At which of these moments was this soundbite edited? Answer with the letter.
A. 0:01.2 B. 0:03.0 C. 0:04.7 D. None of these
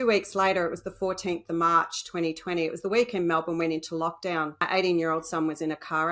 C